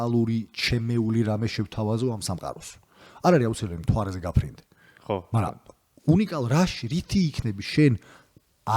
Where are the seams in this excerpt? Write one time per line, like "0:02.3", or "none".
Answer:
none

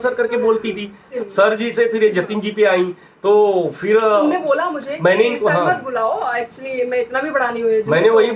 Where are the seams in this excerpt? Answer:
none

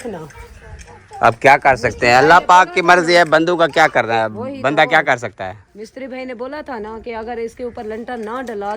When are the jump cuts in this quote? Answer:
none

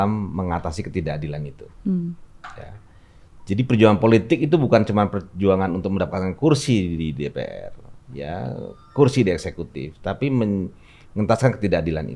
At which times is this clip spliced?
none

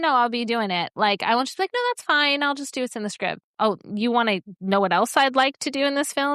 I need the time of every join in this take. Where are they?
none

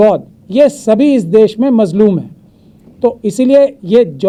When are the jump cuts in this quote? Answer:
none

